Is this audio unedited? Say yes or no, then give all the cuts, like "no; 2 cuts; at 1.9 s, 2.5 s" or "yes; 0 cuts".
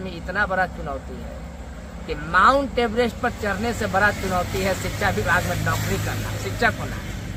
yes; 0 cuts